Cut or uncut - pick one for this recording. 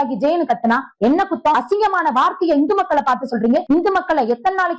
cut